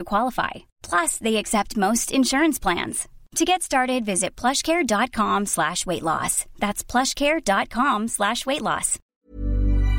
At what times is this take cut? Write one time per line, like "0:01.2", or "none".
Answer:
0:09.0